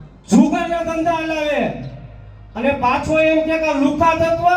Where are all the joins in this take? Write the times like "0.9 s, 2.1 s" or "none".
none